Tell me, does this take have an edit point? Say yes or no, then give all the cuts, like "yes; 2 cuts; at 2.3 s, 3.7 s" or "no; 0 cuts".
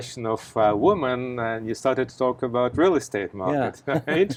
no; 0 cuts